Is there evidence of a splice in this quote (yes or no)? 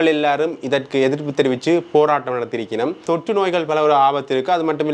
yes